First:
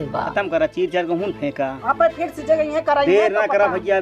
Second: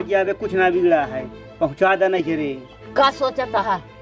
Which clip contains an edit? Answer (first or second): first